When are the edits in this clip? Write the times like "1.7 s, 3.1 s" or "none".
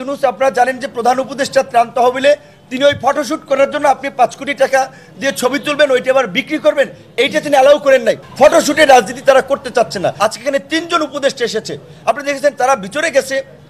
8.2 s, 10.1 s